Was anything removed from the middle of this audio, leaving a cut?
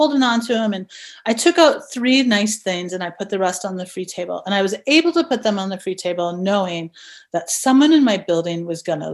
no; 0 cuts

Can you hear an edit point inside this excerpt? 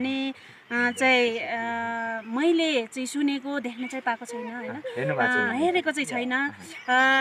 no; 0 cuts

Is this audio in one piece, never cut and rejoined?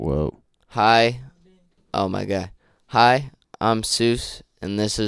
yes; 0 cuts

